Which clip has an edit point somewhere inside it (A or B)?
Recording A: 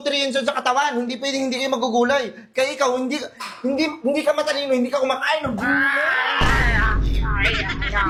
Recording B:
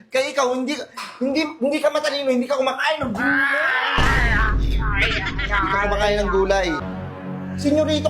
B